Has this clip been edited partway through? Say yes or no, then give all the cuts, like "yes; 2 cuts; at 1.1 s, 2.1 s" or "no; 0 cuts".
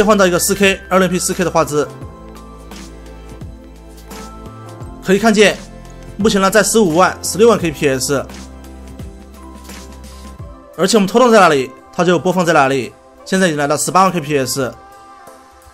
yes; 1 cut; at 14.8 s